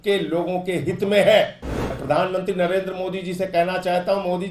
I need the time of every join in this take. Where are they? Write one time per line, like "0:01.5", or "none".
0:01.9